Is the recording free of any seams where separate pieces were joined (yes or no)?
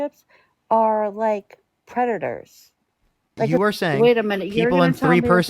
no